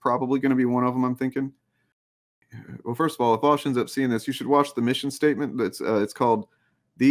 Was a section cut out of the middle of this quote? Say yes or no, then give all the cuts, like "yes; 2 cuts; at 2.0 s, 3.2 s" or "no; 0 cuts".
yes; 1 cut; at 2.1 s